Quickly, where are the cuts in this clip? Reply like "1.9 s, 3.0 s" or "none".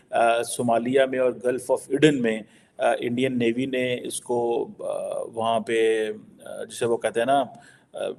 none